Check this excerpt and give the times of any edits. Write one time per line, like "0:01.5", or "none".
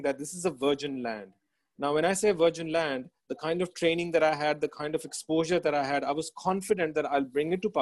none